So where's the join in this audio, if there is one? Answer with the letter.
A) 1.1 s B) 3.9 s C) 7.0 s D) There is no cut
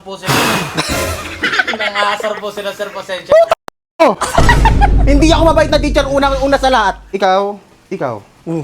C